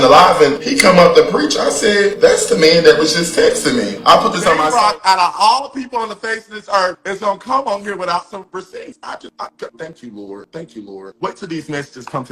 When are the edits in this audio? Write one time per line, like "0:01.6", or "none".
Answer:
0:04.5